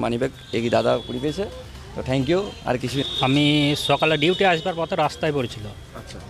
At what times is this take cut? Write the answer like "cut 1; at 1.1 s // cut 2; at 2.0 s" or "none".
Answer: cut 1; at 3.0 s